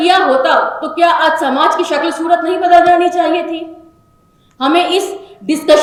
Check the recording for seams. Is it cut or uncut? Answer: uncut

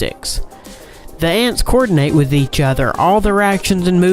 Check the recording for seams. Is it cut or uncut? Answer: cut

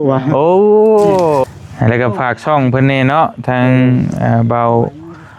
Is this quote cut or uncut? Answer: cut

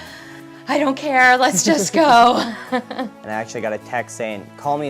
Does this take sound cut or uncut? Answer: cut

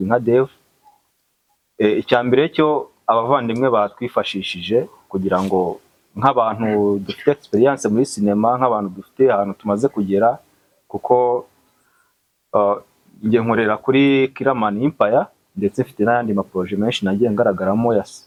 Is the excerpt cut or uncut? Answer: uncut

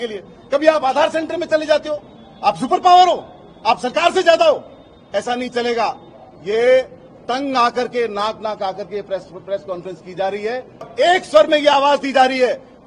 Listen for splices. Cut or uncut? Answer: cut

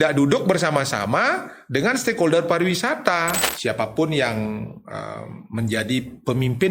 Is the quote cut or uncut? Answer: cut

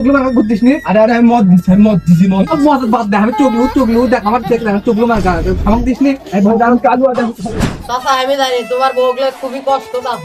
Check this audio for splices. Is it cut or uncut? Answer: cut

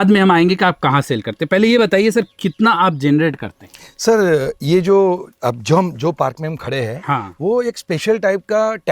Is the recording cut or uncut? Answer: uncut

